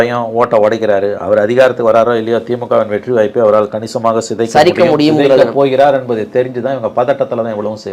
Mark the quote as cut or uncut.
uncut